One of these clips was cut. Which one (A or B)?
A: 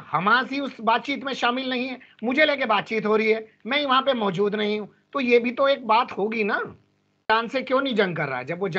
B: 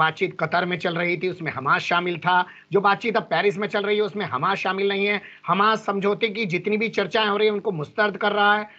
A